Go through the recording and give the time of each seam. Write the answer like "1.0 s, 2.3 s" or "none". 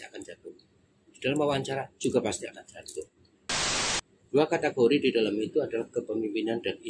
3.7 s